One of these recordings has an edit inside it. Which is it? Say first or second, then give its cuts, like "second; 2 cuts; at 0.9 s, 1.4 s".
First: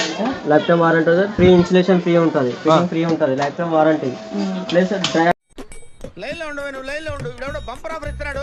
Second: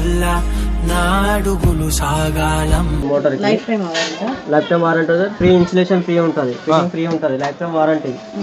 second; 1 cut; at 3.0 s